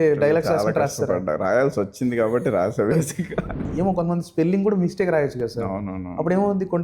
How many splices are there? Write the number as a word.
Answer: one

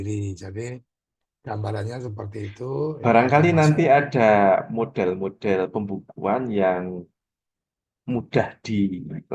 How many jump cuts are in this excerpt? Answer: one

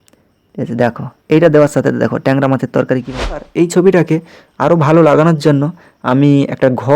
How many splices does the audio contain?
one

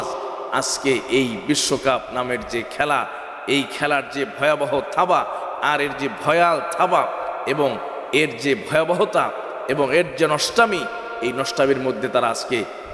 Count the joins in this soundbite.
zero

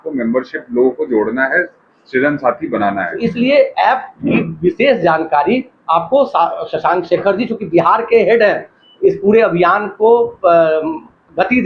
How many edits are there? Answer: one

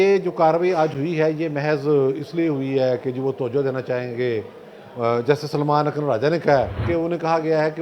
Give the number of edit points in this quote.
one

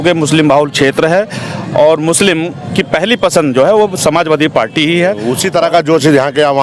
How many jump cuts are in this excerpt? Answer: one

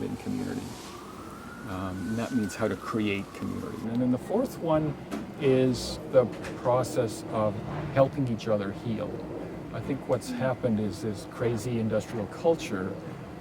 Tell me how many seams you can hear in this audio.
two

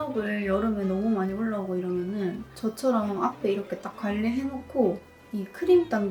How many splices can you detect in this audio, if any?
zero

